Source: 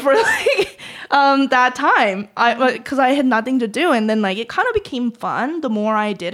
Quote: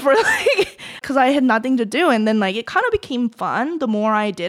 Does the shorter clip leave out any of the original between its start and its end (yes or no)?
yes